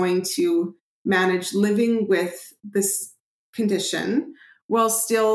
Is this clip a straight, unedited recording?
yes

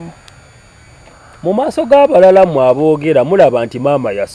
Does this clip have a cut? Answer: no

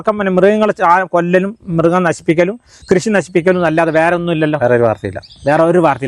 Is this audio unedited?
yes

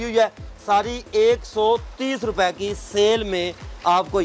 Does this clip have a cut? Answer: no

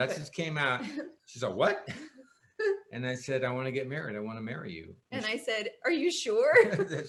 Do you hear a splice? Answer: no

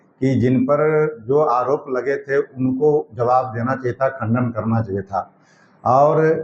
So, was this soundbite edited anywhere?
no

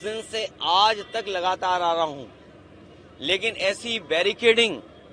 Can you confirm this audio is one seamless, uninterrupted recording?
yes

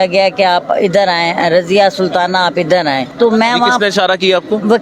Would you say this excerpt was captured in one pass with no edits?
no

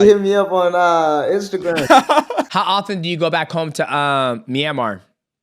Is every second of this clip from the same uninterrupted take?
no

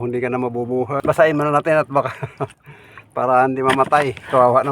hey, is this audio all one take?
no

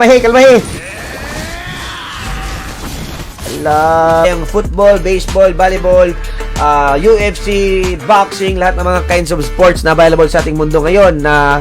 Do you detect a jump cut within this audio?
yes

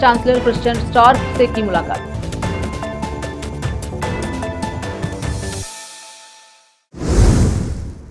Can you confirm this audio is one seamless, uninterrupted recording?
no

